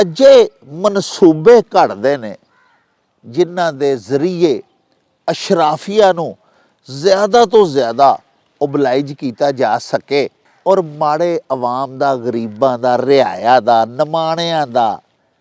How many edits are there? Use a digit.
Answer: 1